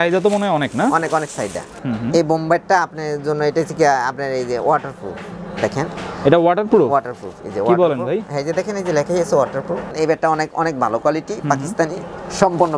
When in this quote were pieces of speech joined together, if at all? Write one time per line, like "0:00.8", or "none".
0:01.9
0:09.9